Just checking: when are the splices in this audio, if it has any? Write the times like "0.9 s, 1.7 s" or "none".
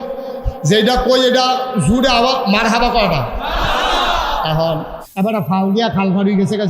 5.0 s

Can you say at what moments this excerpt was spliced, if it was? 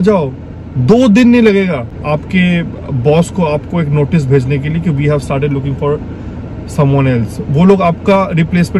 none

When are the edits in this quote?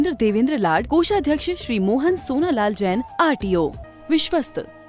3.9 s

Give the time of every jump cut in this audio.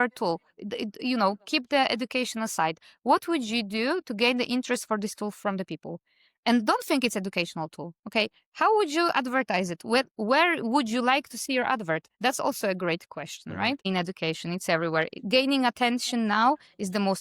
13.9 s

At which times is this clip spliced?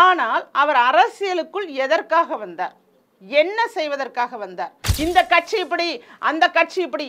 4.8 s

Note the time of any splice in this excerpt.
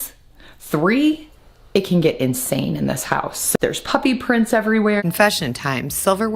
3.5 s, 5.0 s

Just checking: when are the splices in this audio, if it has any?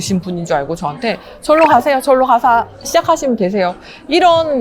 none

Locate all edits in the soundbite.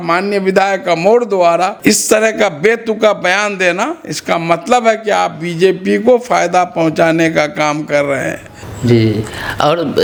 none

